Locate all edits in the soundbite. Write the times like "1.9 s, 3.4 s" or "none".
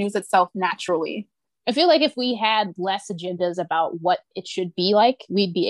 1.1 s

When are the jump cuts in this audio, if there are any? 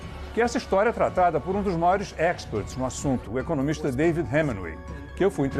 3.8 s

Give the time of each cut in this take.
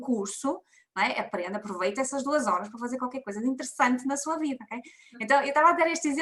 none

